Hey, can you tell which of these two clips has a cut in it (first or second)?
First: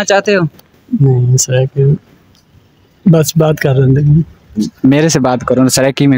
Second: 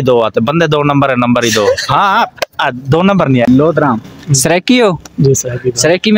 second